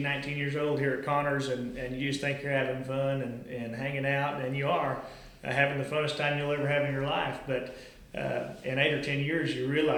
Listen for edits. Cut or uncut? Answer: uncut